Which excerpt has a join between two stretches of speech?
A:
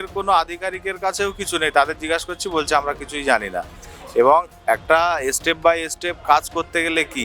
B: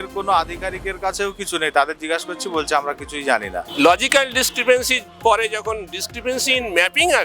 B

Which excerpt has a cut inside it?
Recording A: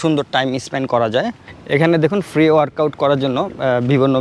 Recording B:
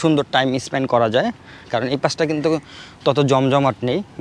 A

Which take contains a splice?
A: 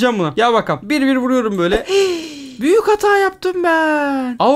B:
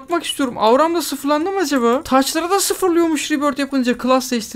A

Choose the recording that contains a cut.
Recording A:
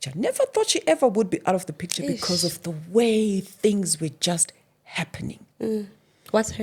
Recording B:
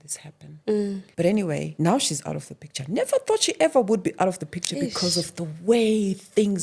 B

